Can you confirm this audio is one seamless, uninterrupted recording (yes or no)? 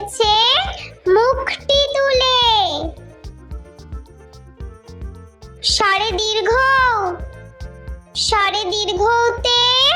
yes